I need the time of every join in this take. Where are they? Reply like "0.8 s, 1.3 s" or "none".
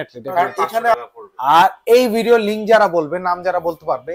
0.9 s